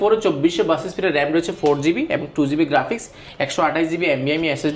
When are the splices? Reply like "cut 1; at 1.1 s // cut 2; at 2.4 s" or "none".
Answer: none